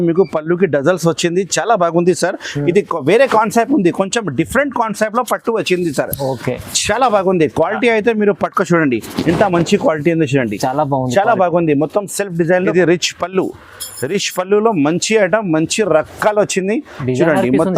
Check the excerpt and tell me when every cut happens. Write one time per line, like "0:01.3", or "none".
0:12.7